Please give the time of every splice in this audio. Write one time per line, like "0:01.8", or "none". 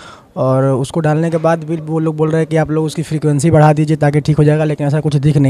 none